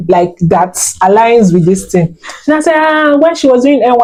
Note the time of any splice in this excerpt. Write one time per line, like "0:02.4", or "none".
none